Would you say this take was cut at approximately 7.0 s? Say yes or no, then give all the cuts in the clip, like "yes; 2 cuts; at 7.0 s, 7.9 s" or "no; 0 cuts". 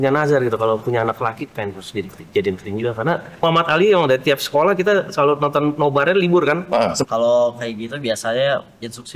yes; 2 cuts; at 3.4 s, 7.0 s